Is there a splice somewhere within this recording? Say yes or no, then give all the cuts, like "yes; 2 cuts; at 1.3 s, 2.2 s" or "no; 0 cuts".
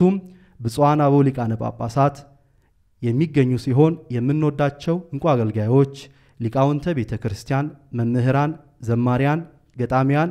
no; 0 cuts